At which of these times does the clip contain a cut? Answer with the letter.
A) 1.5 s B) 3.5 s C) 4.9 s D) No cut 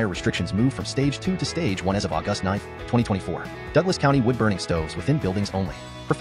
D